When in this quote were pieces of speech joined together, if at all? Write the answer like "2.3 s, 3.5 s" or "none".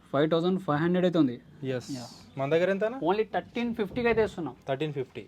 none